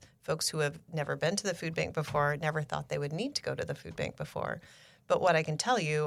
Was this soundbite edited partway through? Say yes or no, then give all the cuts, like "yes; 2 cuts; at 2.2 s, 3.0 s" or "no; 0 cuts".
no; 0 cuts